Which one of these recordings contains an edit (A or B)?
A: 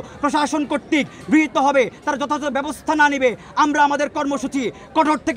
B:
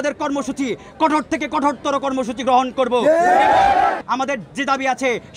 B